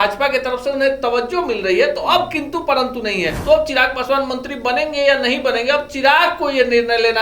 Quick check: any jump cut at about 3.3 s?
yes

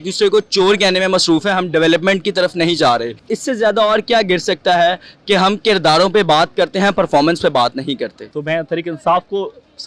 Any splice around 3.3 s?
yes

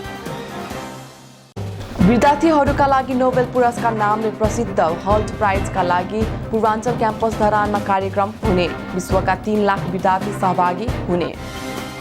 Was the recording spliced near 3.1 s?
no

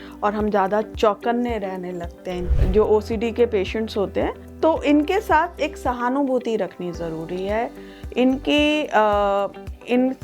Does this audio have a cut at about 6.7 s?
no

